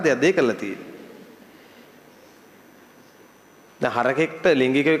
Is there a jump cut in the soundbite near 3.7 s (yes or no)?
yes